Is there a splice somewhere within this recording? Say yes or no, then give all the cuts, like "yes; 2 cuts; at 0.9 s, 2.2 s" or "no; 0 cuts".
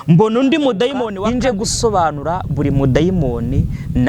yes; 1 cut; at 1.2 s